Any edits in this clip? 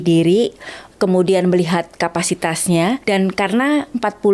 yes; 1 cut; at 3.0 s

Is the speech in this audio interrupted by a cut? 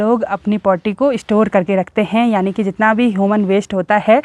no; 0 cuts

